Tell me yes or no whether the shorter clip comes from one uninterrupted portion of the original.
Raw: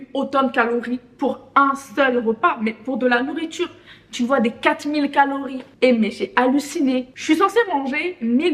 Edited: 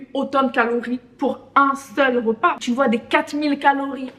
no